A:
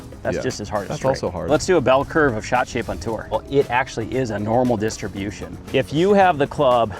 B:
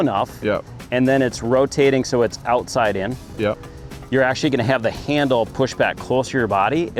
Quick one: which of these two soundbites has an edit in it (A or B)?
A